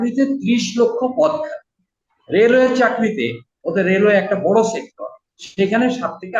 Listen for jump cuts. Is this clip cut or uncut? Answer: uncut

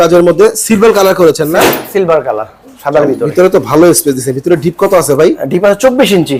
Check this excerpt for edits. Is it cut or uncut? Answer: uncut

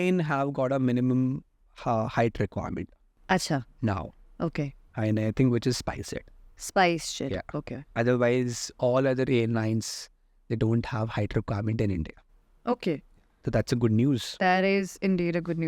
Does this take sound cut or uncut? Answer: uncut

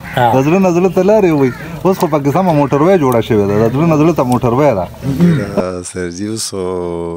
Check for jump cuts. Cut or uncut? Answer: cut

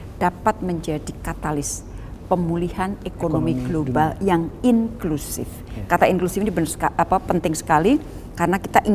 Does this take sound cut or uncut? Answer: uncut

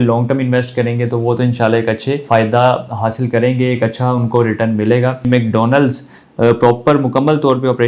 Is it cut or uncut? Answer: cut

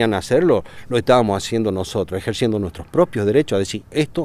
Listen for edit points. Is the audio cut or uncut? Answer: uncut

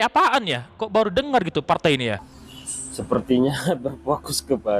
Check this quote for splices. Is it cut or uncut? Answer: cut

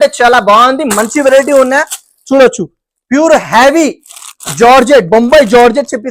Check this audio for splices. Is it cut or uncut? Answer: uncut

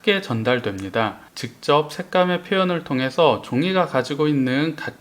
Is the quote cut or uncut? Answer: cut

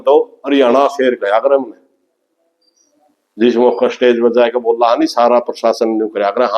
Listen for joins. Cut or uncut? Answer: uncut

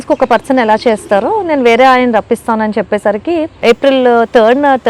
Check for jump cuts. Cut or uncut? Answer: cut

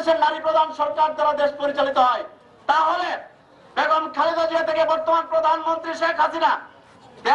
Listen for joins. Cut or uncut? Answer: uncut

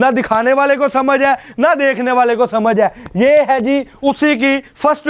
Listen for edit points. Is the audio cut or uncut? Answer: uncut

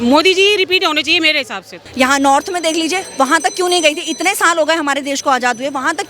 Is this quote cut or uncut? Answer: cut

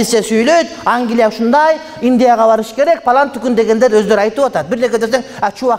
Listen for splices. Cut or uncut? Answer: uncut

